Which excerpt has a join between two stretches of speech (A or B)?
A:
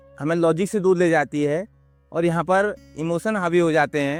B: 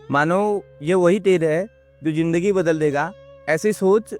B